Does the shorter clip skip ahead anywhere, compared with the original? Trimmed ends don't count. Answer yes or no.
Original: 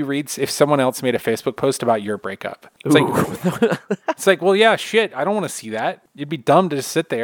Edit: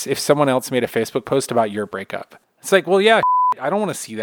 yes